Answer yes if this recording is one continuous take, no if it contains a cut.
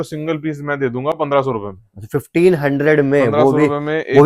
yes